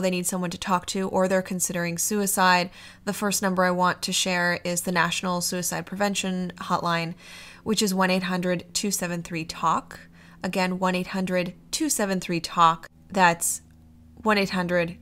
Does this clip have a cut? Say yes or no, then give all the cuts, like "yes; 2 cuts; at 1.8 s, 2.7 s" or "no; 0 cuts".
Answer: no; 0 cuts